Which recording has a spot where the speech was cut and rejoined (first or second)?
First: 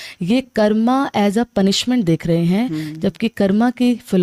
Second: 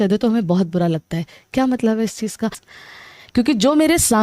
second